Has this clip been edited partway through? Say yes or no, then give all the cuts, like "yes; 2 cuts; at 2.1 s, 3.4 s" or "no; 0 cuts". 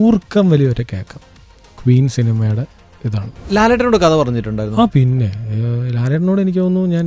yes; 1 cut; at 3.3 s